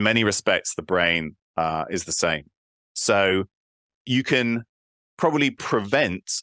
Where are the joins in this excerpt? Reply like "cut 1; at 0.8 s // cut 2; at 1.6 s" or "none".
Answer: cut 1; at 4.0 s